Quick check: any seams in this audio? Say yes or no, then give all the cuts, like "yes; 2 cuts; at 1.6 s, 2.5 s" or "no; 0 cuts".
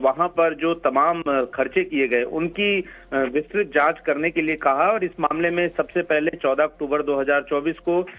yes; 1 cut; at 6.8 s